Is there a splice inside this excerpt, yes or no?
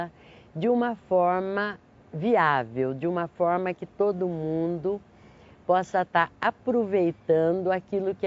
no